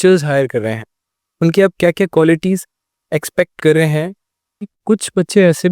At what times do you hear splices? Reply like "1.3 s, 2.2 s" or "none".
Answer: 4.8 s